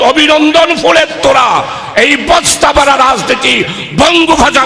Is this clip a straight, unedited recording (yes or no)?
yes